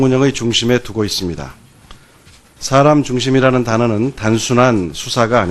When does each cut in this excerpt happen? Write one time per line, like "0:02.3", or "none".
0:01.7